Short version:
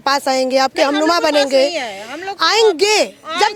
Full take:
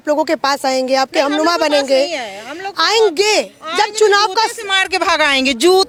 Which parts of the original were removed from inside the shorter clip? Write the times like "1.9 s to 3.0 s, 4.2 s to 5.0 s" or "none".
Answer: none

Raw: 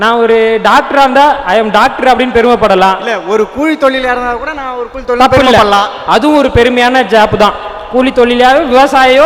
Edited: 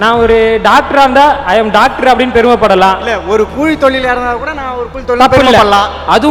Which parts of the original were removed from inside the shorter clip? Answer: none

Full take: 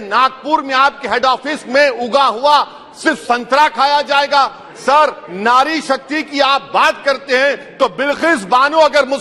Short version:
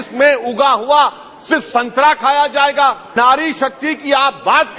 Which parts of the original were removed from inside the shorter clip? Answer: 4.6 s to 5.3 s

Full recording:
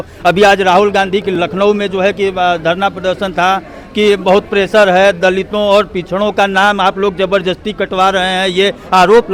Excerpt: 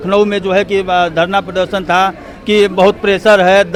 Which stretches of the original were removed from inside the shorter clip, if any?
none

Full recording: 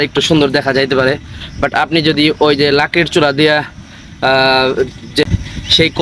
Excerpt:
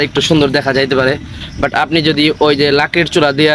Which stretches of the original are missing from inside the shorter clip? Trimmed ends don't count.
none

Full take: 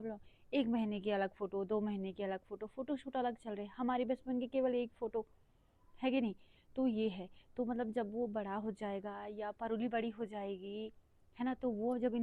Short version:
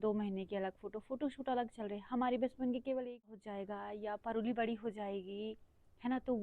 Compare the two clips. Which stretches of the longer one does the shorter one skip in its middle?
5.0 s to 8.7 s

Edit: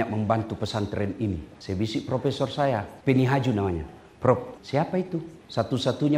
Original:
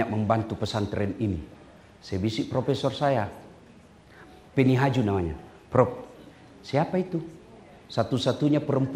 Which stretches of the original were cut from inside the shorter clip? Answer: 1.5 s to 1.9 s, 3.4 s to 4.4 s, 6.5 s to 7.4 s

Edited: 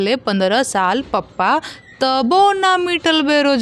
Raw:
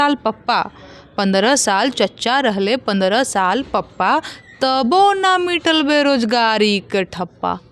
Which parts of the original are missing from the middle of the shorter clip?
none

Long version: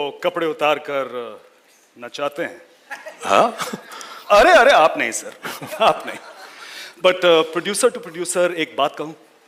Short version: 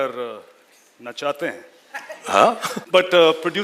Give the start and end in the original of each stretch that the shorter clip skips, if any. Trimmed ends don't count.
3.7 s to 6.8 s

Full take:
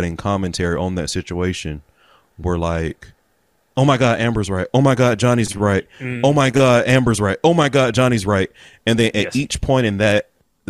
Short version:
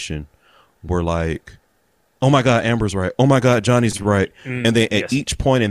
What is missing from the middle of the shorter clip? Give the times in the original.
6.0 s to 8.7 s

